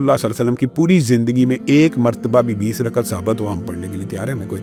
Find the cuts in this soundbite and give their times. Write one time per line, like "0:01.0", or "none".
none